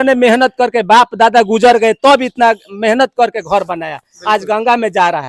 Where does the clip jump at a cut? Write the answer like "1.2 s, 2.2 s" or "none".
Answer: none